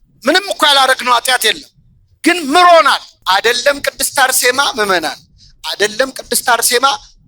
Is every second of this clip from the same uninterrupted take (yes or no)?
no